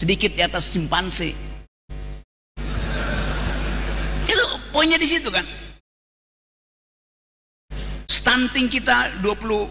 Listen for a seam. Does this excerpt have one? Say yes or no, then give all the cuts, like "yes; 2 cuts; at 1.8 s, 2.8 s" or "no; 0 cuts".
no; 0 cuts